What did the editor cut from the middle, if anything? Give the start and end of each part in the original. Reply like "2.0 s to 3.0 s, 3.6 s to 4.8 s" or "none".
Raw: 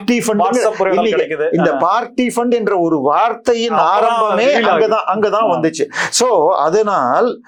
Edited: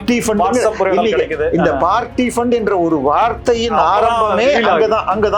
none

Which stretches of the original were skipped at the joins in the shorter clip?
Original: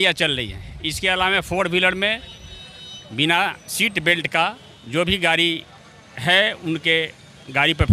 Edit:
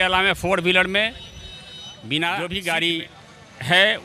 3.5 s to 5.0 s

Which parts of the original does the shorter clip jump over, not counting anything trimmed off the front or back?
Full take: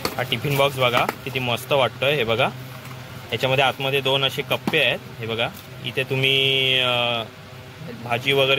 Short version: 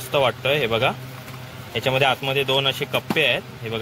none

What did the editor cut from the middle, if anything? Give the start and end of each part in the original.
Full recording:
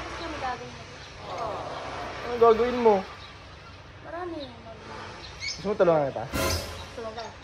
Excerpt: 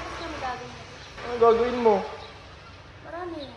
1.2 s to 2.2 s

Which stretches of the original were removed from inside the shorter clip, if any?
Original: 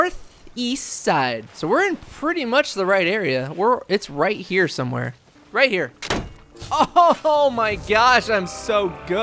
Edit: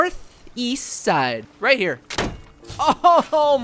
1.5 s to 5.4 s

